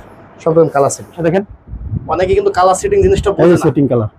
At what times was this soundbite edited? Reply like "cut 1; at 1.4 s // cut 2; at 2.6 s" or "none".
cut 1; at 1.2 s

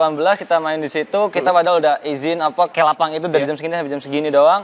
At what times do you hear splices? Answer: cut 1; at 2.7 s

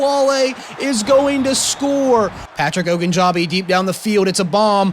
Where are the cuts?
cut 1; at 2.4 s

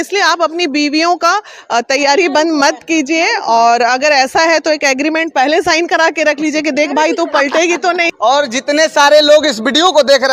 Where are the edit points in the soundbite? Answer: none

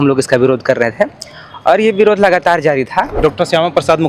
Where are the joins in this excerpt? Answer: cut 1; at 3.1 s

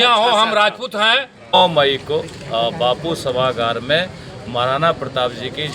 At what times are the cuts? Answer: cut 1; at 1.6 s

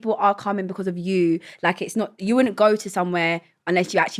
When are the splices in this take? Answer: none

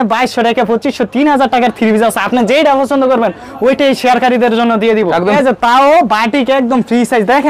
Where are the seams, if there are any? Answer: cut 1; at 5.3 s

